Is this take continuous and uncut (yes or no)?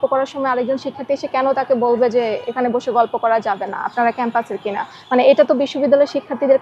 yes